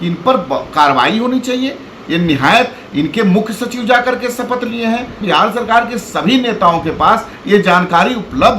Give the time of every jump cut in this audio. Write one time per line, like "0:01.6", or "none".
0:05.2